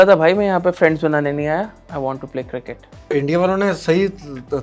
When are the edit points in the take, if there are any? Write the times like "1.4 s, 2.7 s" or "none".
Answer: 1.8 s, 3.1 s